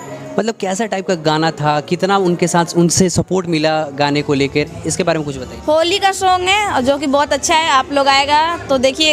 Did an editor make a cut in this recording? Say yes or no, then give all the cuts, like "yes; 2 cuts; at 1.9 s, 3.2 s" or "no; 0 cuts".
no; 0 cuts